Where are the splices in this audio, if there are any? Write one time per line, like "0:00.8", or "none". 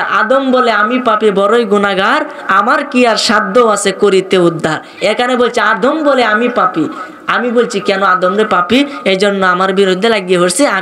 none